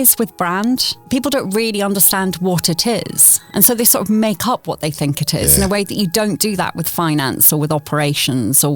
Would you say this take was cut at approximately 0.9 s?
yes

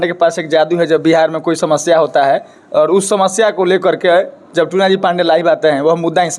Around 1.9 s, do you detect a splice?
no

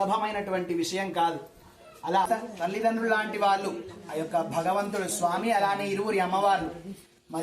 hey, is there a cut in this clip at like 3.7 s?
no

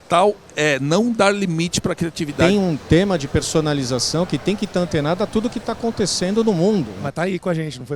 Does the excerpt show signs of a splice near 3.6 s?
no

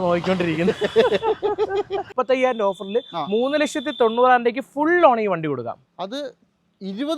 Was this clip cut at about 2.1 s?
yes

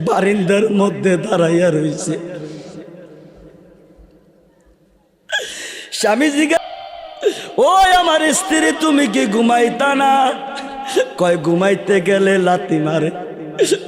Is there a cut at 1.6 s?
no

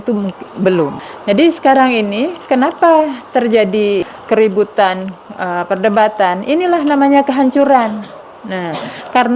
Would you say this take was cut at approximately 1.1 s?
yes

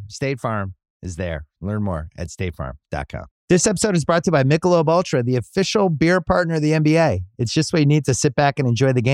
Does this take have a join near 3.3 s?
yes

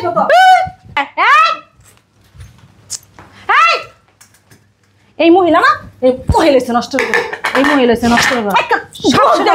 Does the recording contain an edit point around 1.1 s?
yes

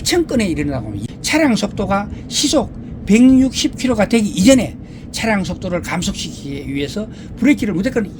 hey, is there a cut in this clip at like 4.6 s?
no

